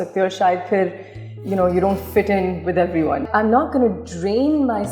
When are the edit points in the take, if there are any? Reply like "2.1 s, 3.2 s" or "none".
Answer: 3.2 s